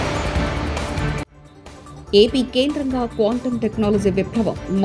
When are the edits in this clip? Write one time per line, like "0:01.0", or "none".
none

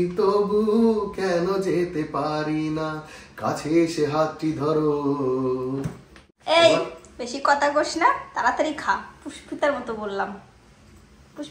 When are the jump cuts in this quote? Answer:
0:06.1

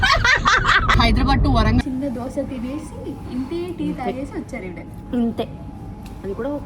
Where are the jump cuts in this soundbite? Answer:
0:00.9
0:01.8

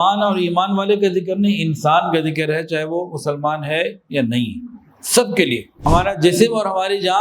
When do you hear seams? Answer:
0:05.8

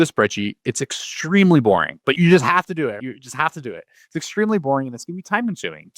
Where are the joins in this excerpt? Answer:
0:02.0
0:03.0

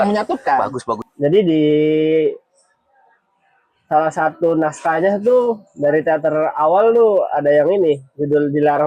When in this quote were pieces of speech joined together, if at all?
0:00.9

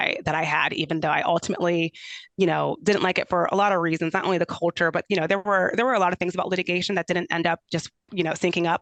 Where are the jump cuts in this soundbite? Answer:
none

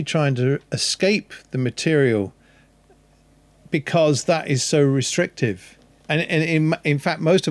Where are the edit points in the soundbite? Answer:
none

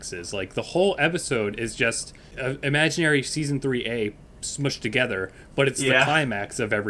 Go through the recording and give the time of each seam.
none

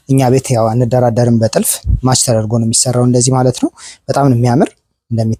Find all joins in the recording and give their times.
none

